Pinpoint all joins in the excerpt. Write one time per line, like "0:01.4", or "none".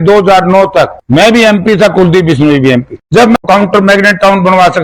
0:03.4